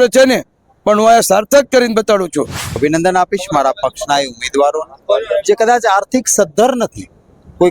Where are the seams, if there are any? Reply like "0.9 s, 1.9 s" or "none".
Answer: 2.8 s